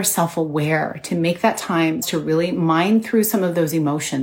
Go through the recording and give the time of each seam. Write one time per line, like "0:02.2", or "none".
0:02.1